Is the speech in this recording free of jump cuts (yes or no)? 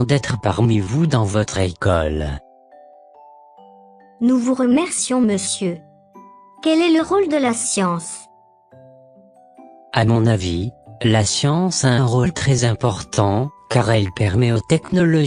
yes